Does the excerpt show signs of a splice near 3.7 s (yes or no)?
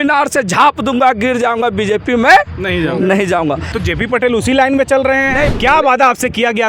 yes